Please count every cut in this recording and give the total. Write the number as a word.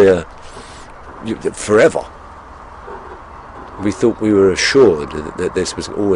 zero